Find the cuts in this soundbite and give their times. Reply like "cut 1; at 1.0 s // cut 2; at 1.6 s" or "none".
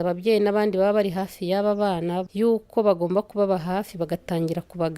cut 1; at 2.3 s